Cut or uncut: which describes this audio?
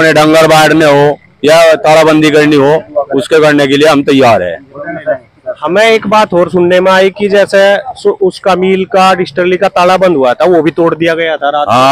uncut